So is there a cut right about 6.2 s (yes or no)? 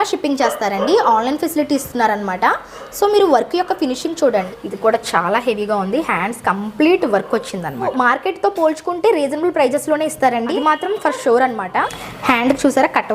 no